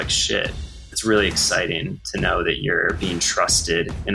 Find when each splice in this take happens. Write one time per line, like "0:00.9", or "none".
0:01.0